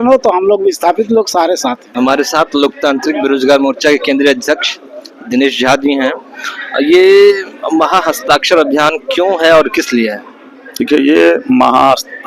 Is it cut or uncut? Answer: uncut